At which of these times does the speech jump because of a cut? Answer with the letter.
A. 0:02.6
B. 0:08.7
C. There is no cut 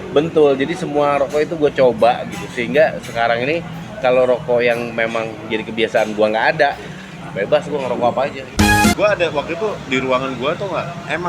B